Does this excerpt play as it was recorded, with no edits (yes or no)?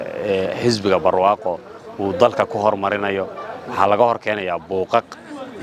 yes